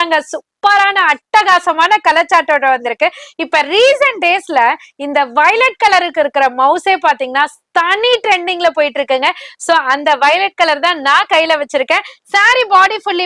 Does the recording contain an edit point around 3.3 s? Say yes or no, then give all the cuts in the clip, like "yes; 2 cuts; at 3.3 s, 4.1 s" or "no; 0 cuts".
no; 0 cuts